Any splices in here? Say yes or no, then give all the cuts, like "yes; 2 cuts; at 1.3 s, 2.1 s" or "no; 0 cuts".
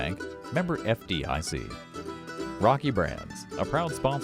yes; 1 cut; at 1.9 s